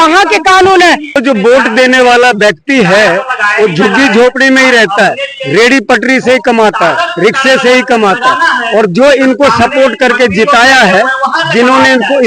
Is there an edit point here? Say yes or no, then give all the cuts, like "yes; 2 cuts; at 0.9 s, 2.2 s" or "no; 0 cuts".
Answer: yes; 1 cut; at 1.2 s